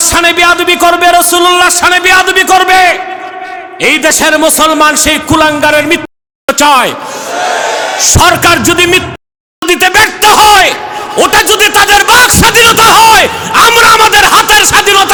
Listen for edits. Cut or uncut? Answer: uncut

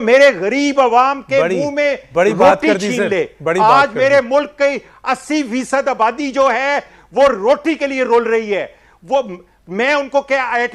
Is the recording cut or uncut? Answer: uncut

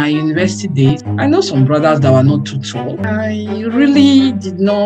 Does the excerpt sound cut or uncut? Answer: cut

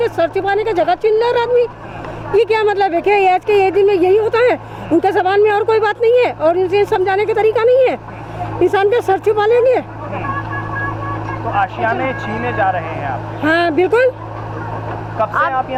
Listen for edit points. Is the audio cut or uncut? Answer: uncut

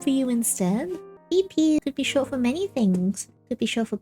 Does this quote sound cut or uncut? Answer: cut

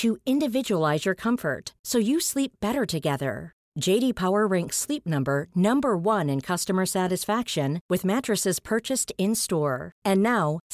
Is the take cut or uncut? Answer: uncut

